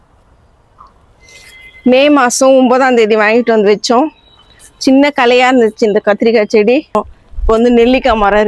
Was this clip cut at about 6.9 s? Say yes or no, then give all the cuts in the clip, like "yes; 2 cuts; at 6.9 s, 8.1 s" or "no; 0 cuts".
yes; 1 cut; at 6.9 s